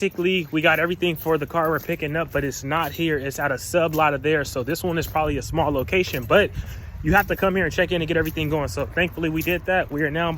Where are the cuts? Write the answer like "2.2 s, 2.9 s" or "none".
none